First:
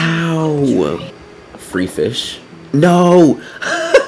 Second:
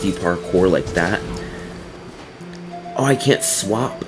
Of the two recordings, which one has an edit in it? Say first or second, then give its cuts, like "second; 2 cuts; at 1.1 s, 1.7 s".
first; 1 cut; at 1.1 s